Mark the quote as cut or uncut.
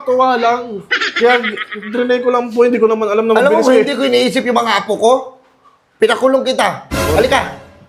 uncut